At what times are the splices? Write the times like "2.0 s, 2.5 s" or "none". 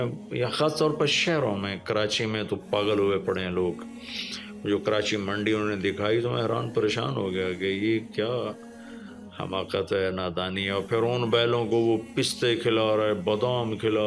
none